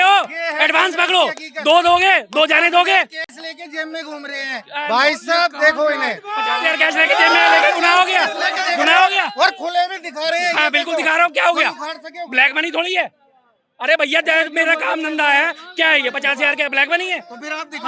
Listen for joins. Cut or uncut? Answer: uncut